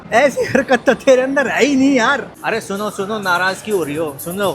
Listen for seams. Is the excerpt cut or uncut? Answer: cut